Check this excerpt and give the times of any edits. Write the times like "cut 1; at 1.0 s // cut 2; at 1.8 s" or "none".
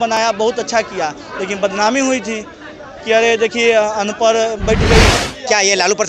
cut 1; at 5.0 s